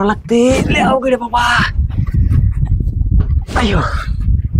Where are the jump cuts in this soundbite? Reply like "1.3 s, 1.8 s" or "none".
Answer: none